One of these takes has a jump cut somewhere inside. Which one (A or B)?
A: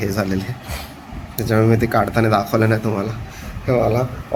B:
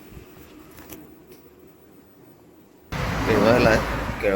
B